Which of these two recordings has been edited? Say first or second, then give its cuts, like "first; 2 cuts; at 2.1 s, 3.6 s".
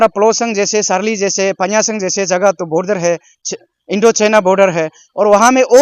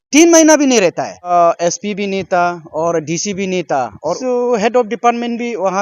second; 2 cuts; at 1.3 s, 4.2 s